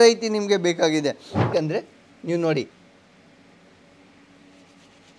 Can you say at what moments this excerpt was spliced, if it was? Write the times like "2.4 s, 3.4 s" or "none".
1.5 s